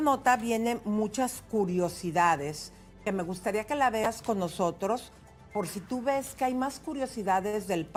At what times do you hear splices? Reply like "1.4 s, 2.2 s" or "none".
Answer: none